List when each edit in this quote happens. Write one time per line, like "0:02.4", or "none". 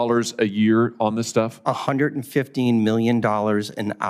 none